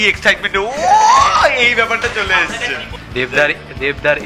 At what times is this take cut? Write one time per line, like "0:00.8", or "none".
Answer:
0:02.9